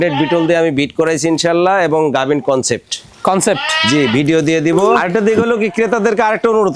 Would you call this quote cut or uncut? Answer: cut